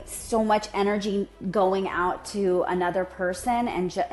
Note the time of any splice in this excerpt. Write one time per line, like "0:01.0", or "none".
none